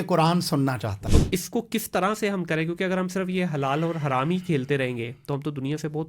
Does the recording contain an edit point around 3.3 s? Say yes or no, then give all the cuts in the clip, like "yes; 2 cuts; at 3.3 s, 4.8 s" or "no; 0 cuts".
no; 1 cut; at 1.0 s